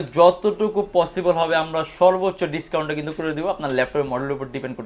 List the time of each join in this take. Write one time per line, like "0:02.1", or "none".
none

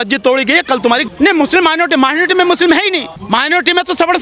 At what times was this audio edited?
0:01.1
0:03.1

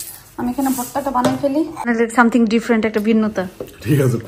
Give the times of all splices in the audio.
0:01.9

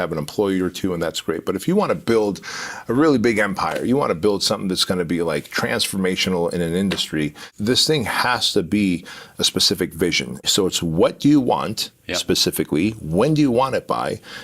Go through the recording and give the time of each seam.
0:07.5
0:10.4

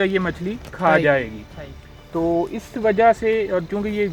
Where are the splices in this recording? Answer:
none

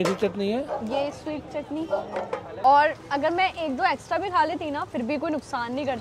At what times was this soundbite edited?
0:02.4

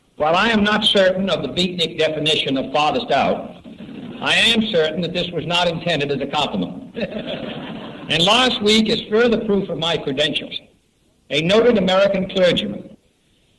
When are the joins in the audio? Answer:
0:04.2

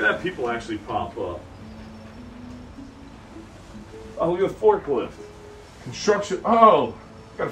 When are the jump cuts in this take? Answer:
none

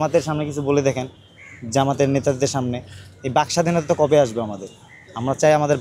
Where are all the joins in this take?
none

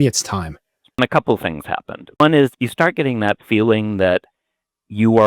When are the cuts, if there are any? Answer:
0:01.0
0:02.2

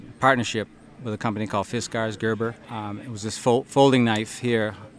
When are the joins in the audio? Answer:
0:02.7

